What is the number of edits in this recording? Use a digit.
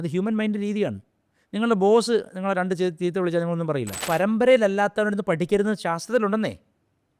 1